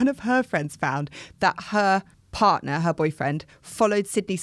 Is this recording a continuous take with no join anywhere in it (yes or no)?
no